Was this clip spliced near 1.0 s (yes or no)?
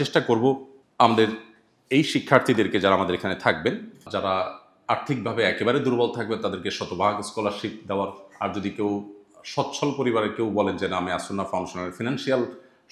no